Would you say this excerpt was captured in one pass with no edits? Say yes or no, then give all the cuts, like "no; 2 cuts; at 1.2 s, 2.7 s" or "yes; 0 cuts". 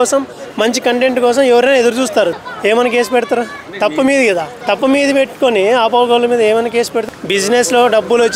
no; 4 cuts; at 2.3 s, 3.6 s, 4.5 s, 7.0 s